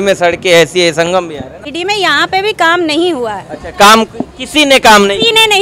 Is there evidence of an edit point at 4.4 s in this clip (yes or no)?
no